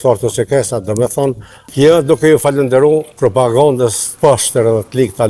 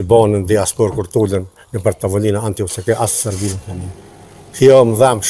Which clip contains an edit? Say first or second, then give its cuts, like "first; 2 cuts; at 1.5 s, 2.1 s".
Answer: first; 3 cuts; at 1.7 s, 3.1 s, 4.0 s